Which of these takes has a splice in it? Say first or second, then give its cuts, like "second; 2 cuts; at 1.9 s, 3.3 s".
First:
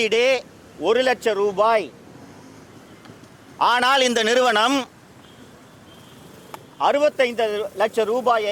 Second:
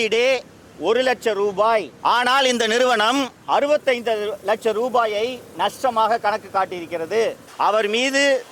second; 3 cuts; at 1.9 s, 3.4 s, 7.4 s